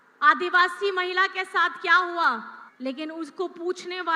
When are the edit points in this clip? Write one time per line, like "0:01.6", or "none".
none